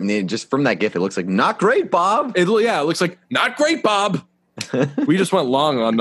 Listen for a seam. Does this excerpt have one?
no; 0 cuts

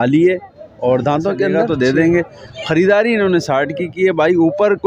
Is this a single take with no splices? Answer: no; 1 cut; at 1.6 s

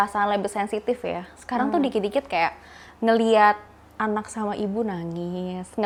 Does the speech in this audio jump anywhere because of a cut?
no; 0 cuts

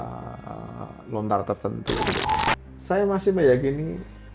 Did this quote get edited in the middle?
yes; 1 cut; at 2.2 s

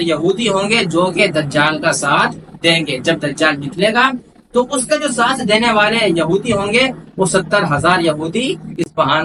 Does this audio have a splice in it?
no; 0 cuts

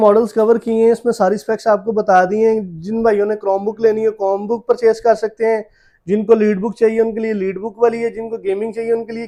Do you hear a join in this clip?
no; 0 cuts

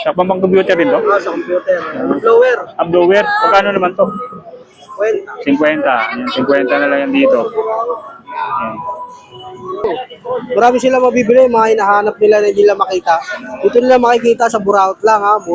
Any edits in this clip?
yes; 1 cut; at 9.9 s

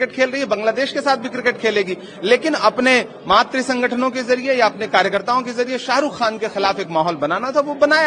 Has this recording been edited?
no; 0 cuts

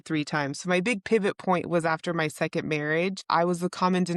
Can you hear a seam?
yes; 1 cut; at 3.2 s

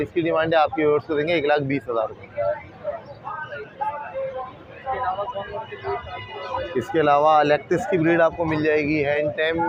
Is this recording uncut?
yes; 0 cuts

